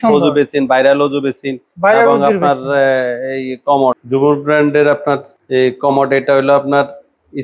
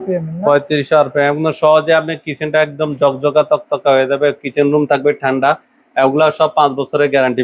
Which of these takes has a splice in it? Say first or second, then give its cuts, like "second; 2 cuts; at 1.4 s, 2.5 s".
first; 2 cuts; at 4.0 s, 5.3 s